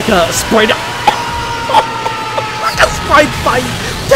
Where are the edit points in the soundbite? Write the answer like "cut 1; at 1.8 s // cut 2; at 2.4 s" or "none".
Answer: none